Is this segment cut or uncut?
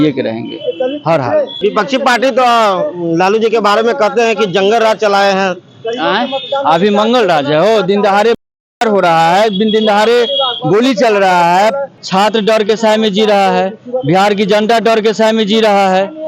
cut